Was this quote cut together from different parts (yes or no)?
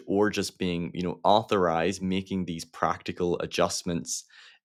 no